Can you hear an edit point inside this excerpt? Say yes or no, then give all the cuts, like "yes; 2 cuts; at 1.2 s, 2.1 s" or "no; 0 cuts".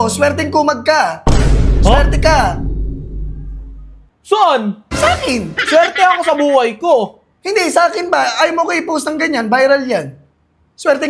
no; 0 cuts